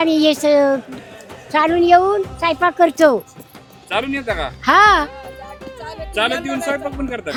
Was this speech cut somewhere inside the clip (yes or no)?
no